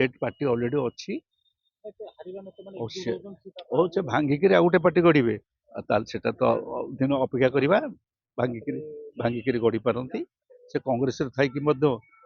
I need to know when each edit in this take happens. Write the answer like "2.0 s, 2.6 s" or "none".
10.5 s